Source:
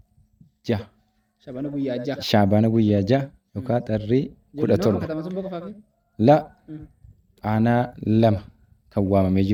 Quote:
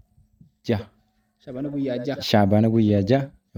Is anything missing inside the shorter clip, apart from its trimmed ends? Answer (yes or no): no